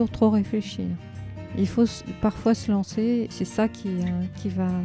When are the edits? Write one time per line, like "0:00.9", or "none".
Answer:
0:03.3